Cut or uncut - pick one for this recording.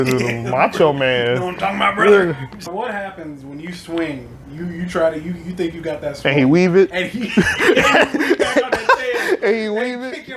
cut